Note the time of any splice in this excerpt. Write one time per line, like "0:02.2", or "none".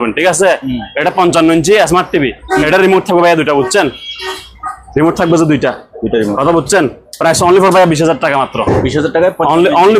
none

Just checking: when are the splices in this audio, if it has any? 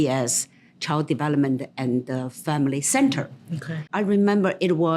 0:03.9

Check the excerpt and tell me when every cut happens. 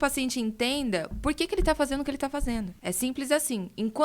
0:02.8

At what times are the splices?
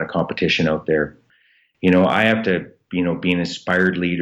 0:01.3

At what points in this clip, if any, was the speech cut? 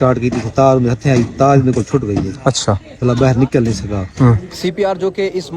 0:04.5

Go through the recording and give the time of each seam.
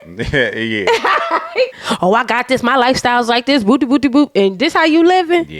0:01.8

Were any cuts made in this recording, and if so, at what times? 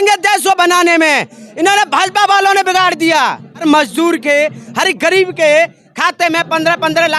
0:03.6

